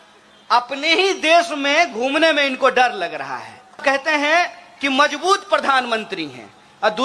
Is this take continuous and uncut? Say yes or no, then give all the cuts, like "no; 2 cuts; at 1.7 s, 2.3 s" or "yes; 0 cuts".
no; 1 cut; at 3.8 s